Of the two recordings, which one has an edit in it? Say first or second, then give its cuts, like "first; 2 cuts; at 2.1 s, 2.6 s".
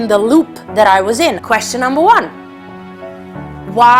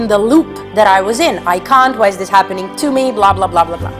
first; 1 cut; at 1.4 s